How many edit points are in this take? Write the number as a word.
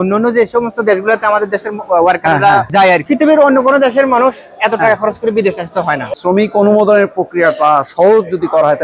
two